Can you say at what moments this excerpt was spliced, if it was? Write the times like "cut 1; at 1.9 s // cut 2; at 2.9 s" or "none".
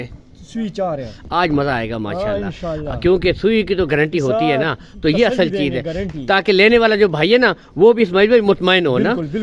none